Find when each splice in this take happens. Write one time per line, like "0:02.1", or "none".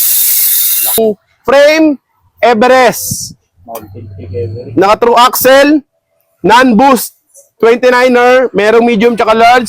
0:01.0